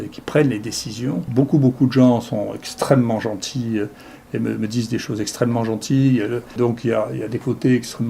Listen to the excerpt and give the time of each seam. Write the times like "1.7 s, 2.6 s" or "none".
1.2 s, 6.5 s